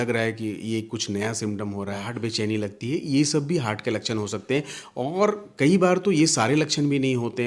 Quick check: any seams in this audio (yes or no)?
yes